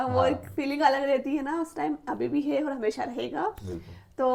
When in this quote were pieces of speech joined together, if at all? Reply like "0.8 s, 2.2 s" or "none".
none